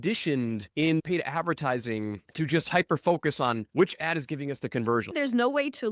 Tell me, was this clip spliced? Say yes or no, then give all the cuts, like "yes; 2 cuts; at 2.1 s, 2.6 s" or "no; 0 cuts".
yes; 4 cuts; at 1.0 s, 2.2 s, 3.6 s, 5.2 s